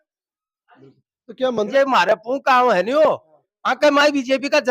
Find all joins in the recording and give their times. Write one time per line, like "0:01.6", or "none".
0:01.7